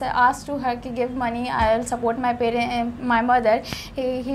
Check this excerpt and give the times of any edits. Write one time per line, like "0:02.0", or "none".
none